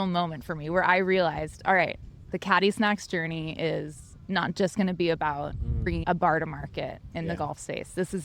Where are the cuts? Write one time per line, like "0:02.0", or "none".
0:06.0